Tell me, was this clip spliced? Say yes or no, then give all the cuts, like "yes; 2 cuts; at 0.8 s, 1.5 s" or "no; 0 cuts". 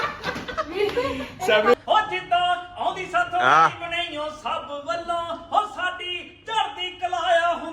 yes; 1 cut; at 1.7 s